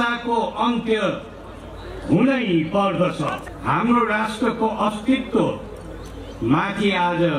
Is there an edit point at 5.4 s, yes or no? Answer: no